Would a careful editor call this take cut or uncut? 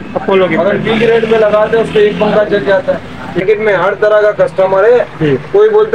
cut